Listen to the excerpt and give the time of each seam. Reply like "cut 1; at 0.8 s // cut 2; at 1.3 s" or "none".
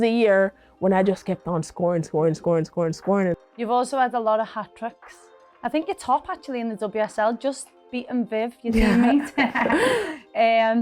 cut 1; at 3.4 s